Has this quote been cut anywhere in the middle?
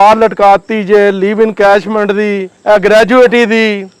yes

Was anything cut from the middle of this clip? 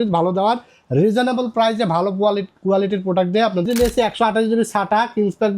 yes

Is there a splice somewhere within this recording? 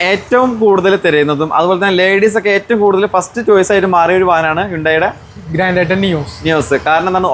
no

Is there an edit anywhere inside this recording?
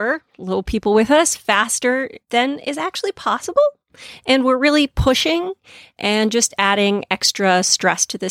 no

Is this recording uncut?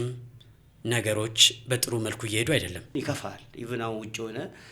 no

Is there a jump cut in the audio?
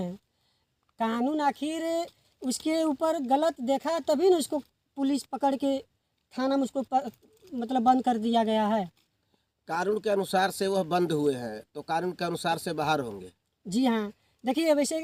no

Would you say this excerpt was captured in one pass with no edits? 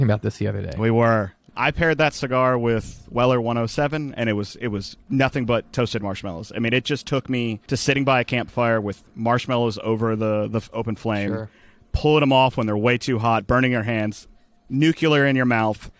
no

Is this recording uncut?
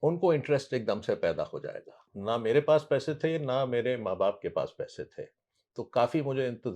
no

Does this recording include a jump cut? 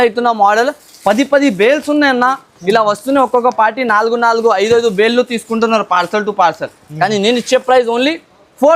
no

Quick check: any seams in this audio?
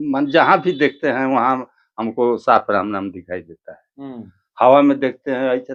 no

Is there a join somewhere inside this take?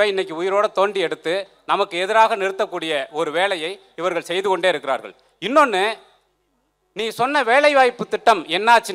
no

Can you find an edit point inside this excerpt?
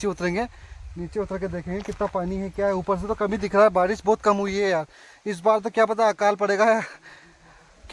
no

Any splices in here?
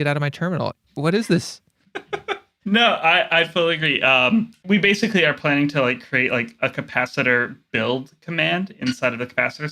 yes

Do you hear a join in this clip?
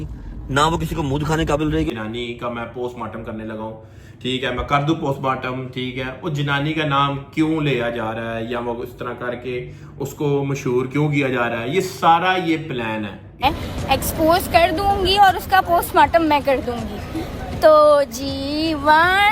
yes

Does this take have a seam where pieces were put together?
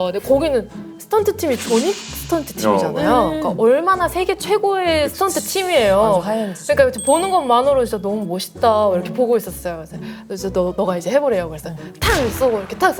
no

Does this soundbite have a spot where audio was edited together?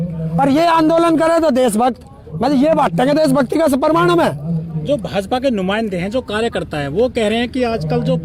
no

